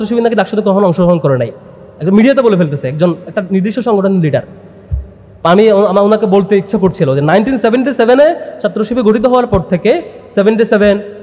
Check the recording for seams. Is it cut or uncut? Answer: uncut